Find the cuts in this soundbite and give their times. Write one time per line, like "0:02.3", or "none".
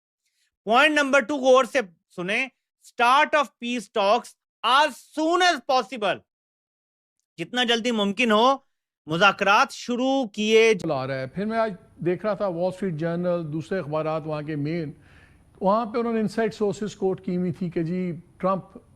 0:10.8